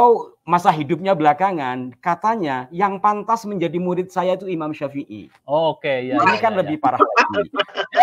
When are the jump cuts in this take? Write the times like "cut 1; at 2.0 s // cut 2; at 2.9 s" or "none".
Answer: none

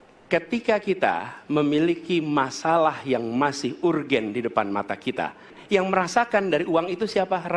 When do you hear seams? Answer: cut 1; at 5.5 s

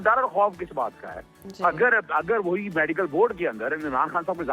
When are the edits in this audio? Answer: none

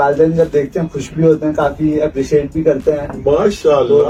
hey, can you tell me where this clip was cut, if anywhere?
none

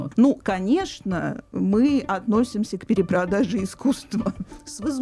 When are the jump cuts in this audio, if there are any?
none

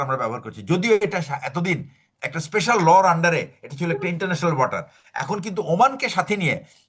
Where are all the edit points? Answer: cut 1; at 2.0 s

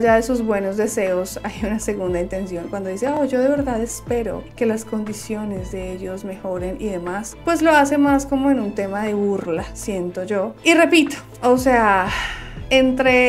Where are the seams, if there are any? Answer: none

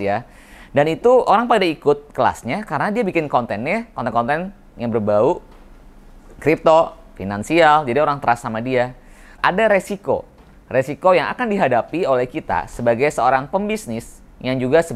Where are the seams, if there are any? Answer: cut 1; at 9.4 s

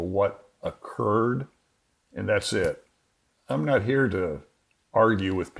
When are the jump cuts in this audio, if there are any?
cut 1; at 3.3 s

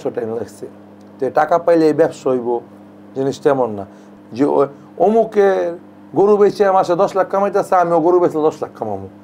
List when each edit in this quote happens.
cut 1; at 4.0 s

